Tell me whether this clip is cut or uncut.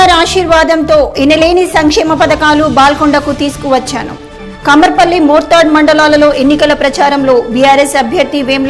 uncut